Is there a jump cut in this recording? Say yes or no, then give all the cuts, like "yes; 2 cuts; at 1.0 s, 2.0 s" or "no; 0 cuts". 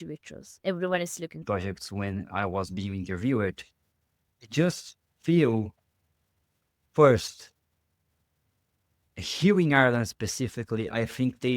yes; 1 cut; at 1.4 s